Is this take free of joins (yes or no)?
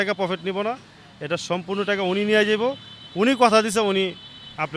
yes